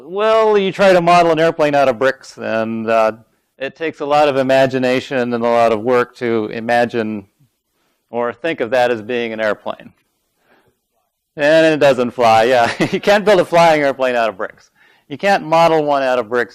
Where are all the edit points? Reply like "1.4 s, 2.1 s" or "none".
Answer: 11.2 s